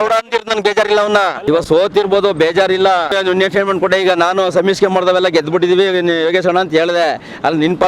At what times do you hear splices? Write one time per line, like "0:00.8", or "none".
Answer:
0:01.4
0:03.1